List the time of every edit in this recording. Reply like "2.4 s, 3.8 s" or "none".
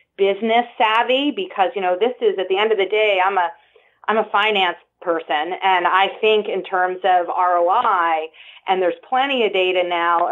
none